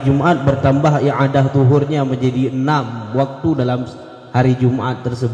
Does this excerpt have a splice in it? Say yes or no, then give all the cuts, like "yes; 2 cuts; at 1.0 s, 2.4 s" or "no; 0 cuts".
no; 0 cuts